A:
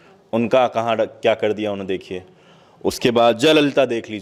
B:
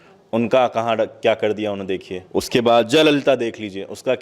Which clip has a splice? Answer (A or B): B